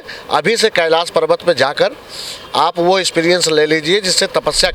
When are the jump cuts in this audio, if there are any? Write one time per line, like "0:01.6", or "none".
none

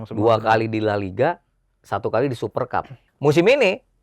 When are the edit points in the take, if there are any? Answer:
0:03.0

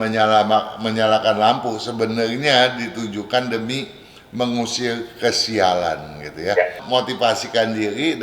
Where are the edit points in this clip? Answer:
0:06.8

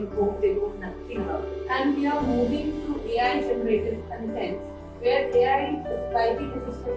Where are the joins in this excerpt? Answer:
0:01.5

